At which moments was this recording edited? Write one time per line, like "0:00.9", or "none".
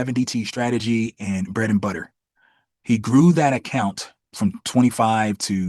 0:04.2